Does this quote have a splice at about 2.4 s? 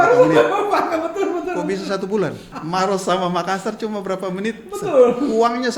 yes; 1 cut; at 2.4 s

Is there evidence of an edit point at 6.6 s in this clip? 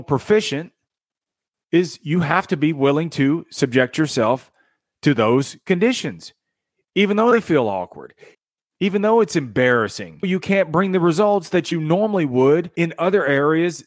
no; 3 cuts; at 8.4 s, 10.3 s, 12.7 s

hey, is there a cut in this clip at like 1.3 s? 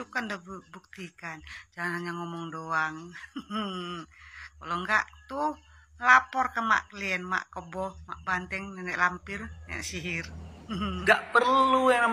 no; 1 cut; at 11.0 s

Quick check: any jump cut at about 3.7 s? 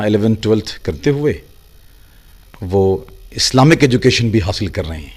no; 0 cuts

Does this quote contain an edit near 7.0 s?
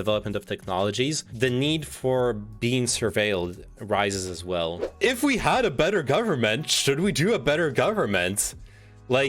no; 2 cuts; at 1.3 s, 4.9 s

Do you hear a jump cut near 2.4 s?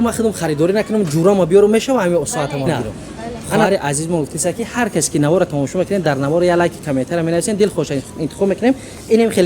no; 1 cut; at 3.6 s

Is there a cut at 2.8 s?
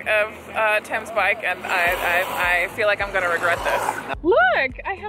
no; 1 cut; at 4.0 s

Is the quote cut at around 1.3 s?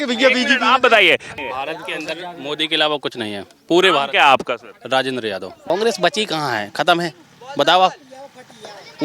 yes; 2 cuts; at 1.3 s, 5.5 s

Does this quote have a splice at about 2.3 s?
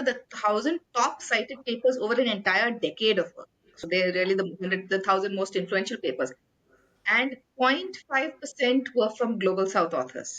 no; 1 cut; at 3.8 s

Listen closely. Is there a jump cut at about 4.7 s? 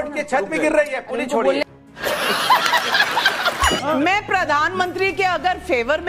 yes; 3 cuts; at 1.7 s, 3.8 s, 4.7 s

